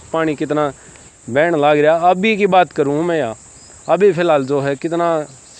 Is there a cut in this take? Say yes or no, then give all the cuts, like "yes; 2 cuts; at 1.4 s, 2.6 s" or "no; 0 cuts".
no; 0 cuts